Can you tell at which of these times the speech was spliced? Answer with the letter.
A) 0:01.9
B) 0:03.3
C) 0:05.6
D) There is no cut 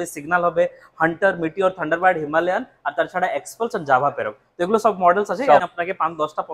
C